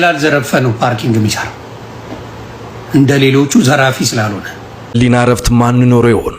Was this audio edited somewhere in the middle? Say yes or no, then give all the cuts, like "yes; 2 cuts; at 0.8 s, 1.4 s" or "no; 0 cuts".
yes; 1 cut; at 4.9 s